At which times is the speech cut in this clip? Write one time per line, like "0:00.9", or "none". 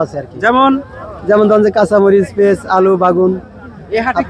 none

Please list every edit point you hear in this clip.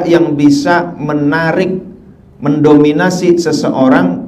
none

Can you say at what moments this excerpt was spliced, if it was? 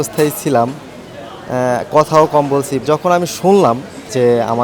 none

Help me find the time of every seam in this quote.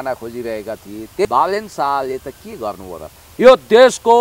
0:01.2

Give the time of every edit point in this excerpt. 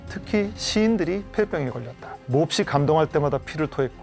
none

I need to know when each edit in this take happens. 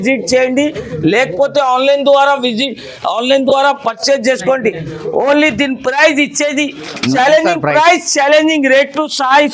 0:07.1

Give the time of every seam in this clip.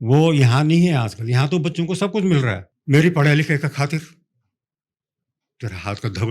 0:02.7

